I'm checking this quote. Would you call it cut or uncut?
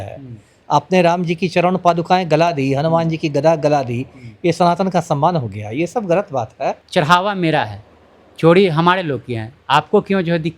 cut